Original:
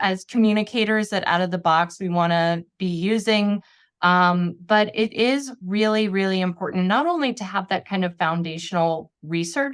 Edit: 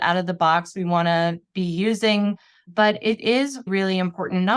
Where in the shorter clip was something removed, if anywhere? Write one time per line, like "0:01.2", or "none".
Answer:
0:02.6
0:03.7